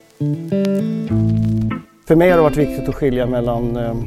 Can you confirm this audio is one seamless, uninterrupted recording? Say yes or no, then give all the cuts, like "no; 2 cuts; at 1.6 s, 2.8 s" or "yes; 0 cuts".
no; 1 cut; at 1.9 s